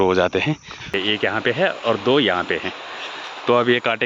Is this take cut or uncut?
cut